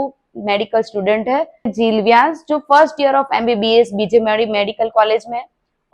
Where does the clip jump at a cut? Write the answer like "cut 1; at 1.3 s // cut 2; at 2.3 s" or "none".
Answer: cut 1; at 1.7 s